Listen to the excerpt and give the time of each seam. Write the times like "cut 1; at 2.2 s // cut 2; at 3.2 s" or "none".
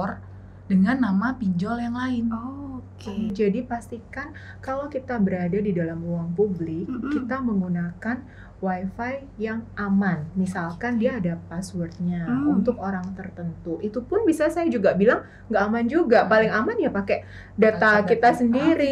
cut 1; at 3.3 s